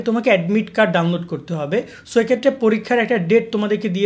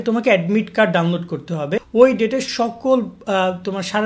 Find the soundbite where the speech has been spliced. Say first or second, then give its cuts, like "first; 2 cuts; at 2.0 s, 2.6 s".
second; 1 cut; at 1.9 s